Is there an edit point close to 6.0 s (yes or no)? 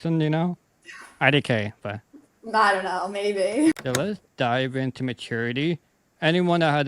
no